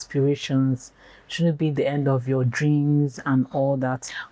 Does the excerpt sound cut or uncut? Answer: uncut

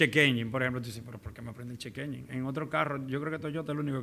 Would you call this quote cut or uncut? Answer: uncut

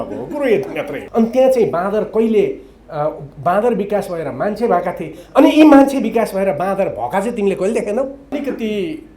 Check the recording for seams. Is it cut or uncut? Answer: cut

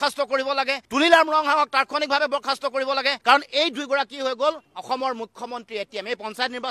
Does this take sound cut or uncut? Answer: uncut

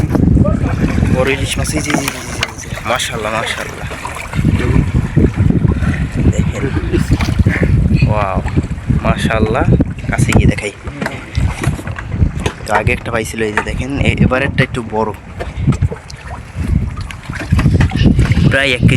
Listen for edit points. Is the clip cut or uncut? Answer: uncut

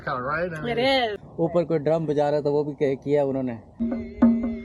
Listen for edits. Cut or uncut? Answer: cut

